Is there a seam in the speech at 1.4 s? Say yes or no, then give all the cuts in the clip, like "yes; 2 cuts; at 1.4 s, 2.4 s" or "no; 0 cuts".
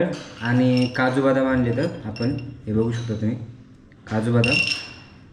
no; 0 cuts